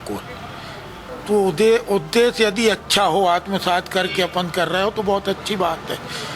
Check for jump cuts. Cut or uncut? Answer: cut